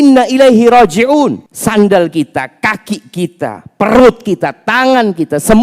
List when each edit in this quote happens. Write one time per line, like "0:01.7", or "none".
0:01.5